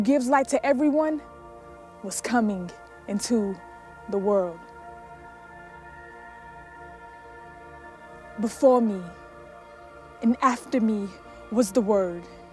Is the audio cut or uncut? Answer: cut